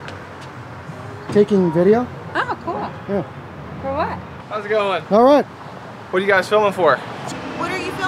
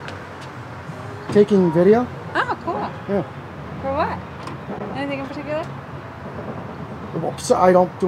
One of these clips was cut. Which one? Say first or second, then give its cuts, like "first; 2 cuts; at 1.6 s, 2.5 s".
first; 2 cuts; at 4.5 s, 7.1 s